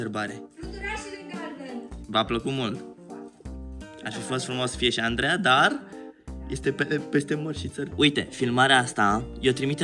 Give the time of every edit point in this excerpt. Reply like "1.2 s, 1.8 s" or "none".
7.8 s